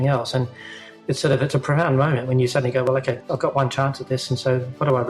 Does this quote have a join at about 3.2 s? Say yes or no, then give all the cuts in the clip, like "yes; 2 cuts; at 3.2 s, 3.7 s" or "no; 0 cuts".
yes; 1 cut; at 3.2 s